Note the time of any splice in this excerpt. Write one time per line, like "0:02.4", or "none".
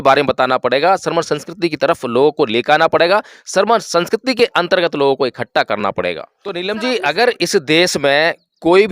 0:06.6